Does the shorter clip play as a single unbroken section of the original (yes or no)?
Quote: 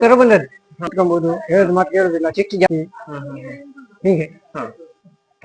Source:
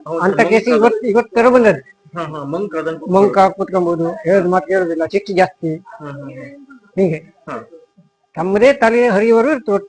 no